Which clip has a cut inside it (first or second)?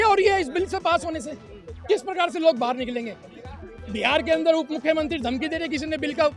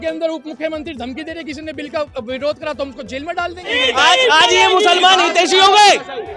second